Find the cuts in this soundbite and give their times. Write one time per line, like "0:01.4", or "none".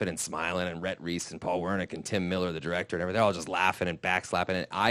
none